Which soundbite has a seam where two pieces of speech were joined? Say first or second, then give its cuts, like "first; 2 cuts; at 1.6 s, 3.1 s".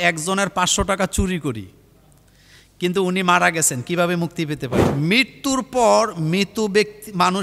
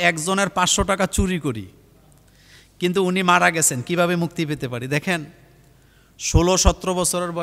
first; 1 cut; at 4.8 s